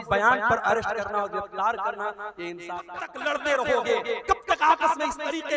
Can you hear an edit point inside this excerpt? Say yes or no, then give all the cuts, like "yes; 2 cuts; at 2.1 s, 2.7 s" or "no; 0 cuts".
yes; 1 cut; at 3.1 s